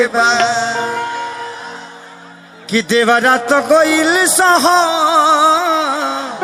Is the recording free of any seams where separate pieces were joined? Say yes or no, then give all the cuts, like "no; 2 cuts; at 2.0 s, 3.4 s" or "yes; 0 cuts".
yes; 0 cuts